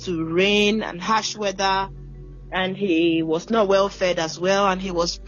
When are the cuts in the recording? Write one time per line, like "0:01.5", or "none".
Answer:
none

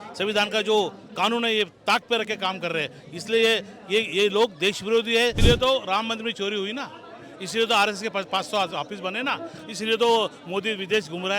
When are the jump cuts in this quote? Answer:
0:05.4

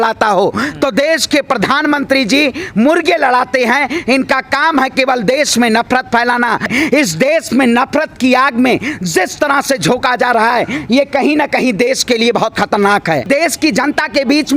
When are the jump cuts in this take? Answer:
0:06.7
0:13.2

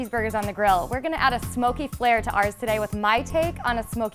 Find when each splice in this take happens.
none

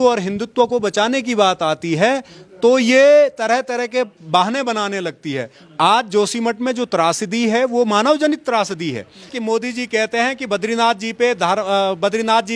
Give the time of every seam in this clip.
0:09.3

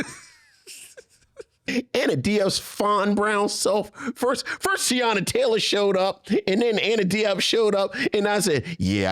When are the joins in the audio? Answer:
0:01.7

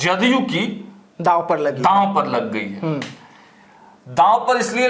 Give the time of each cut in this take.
none

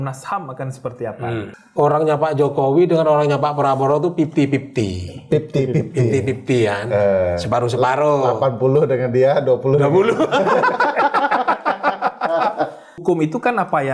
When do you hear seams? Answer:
0:01.6
0:12.4

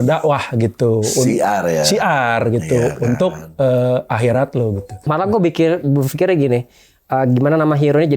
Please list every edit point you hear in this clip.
0:05.1

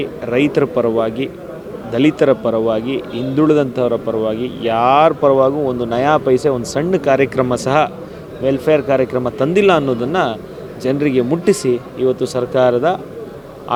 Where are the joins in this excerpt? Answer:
none

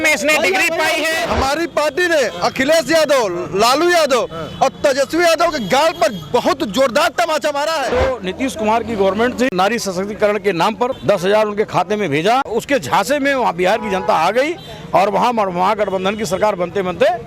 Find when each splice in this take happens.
0:01.2
0:07.9
0:09.5
0:11.0
0:12.5

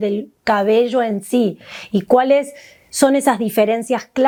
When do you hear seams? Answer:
none

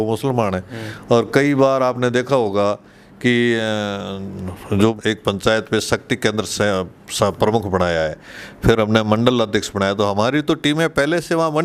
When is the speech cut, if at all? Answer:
0:05.0

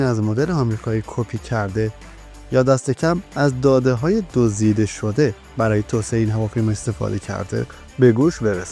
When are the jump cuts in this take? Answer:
0:07.8

